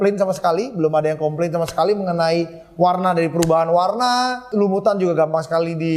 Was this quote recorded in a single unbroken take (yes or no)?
no